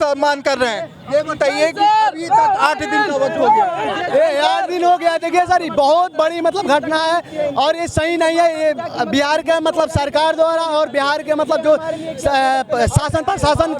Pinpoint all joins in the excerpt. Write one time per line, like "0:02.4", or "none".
none